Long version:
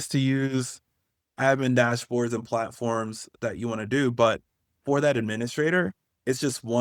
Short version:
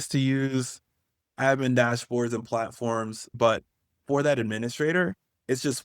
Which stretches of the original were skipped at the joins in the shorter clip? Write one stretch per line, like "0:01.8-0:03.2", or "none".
0:03.4-0:04.1